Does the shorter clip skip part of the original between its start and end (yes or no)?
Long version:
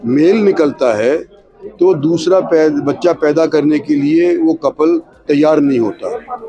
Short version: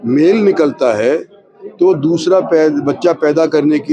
no